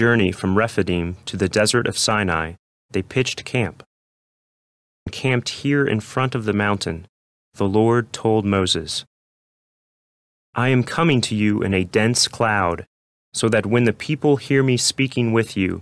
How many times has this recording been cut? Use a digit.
1